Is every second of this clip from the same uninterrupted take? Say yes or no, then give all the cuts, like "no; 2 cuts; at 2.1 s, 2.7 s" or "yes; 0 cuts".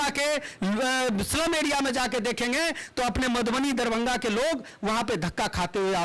yes; 0 cuts